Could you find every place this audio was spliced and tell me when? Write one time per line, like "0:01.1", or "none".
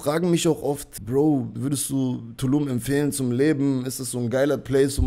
0:00.9
0:01.6